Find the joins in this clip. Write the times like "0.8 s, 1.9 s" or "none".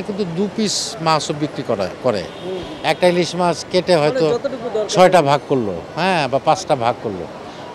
none